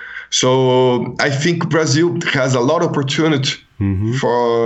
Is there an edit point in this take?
no; 0 cuts

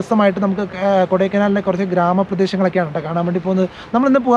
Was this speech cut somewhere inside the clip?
no; 0 cuts

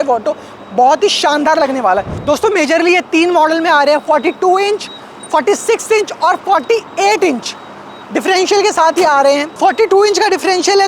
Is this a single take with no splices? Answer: yes; 0 cuts

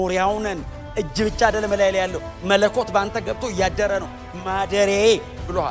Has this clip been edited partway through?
no; 0 cuts

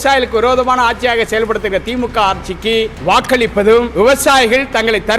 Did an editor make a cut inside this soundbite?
yes; 2 cuts; at 2.9 s, 3.9 s

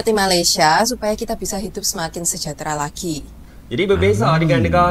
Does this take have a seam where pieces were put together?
no; 0 cuts

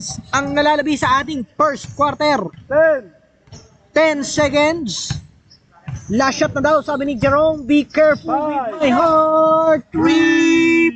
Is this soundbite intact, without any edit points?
yes; 0 cuts

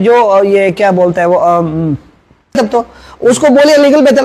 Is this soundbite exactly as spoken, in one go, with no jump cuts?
no; 1 cut; at 2.6 s

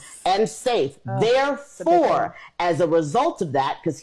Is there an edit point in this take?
no; 0 cuts

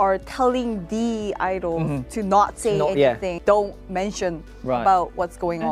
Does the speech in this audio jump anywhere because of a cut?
yes; 1 cut; at 3.3 s

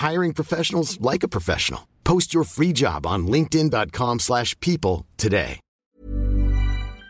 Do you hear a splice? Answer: yes; 1 cut; at 5.6 s

